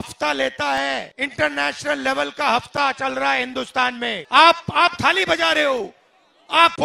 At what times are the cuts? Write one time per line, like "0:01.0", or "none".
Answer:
0:01.1
0:04.1